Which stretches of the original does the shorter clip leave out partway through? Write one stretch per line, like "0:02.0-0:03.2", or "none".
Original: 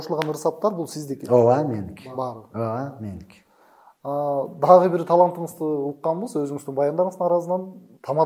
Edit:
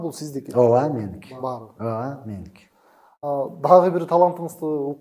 0:04.0-0:04.2